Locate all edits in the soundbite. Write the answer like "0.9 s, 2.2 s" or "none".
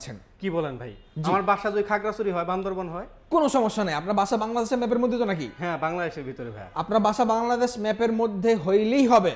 none